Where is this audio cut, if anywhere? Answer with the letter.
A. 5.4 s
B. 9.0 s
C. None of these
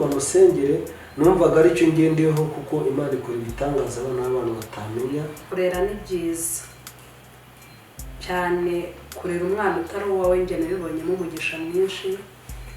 A